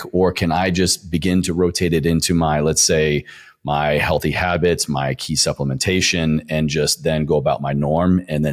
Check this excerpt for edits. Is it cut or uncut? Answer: uncut